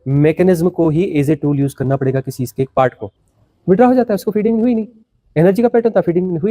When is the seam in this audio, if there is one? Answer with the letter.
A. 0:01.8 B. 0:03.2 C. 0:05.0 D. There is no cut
B